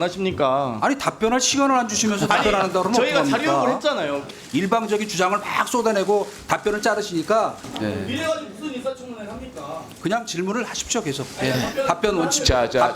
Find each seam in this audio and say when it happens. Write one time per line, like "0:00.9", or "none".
0:04.3
0:07.7